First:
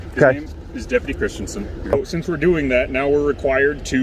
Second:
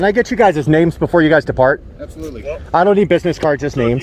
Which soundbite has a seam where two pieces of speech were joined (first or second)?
first